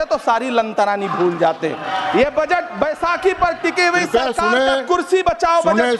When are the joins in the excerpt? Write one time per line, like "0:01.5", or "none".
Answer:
0:01.9